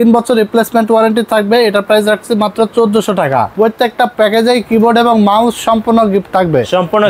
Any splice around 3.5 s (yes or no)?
yes